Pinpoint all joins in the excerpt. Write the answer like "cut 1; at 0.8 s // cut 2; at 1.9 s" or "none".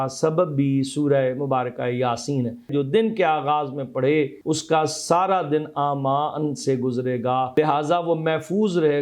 cut 1; at 2.7 s // cut 2; at 4.4 s // cut 3; at 7.5 s